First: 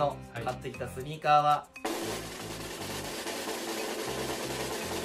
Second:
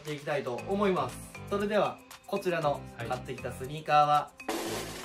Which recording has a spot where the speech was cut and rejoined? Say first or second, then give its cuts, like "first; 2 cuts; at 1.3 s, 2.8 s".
second; 1 cut; at 1.3 s